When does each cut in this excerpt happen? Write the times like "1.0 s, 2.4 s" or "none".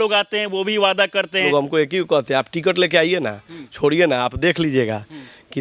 1.5 s